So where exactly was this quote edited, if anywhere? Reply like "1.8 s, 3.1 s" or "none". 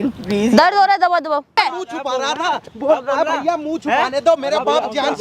1.6 s